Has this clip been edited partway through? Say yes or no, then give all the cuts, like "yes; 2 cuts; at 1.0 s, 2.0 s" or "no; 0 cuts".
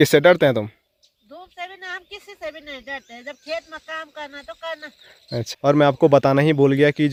no; 0 cuts